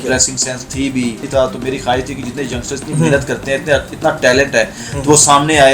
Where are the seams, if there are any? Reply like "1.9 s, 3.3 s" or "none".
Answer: 1.2 s